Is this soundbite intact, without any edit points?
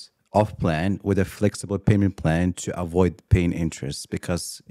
yes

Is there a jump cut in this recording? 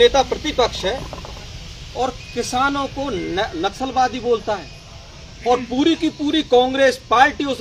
no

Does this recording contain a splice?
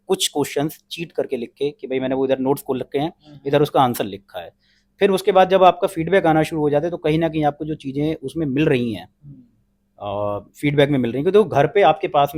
no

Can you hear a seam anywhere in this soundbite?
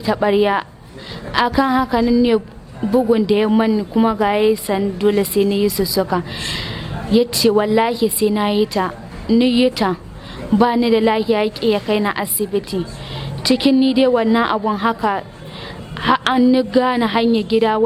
no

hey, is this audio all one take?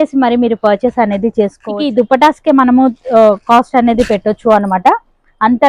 no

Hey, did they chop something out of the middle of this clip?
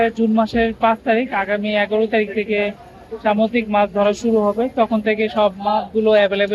no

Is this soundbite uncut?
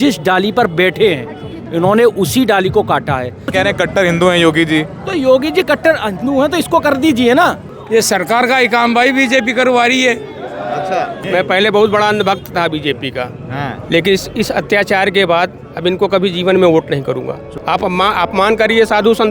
no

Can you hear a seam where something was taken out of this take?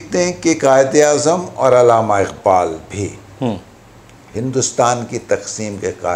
no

